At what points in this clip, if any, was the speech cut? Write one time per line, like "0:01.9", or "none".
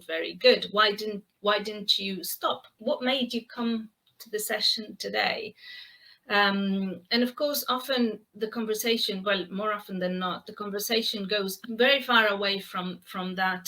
0:02.8
0:11.6